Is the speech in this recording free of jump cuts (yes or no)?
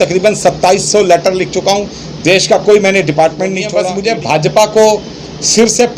no